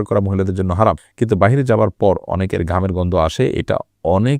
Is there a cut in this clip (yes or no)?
yes